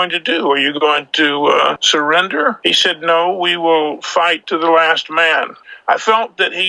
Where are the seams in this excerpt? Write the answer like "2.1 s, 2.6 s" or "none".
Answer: 1.8 s, 2.6 s, 4.4 s, 5.7 s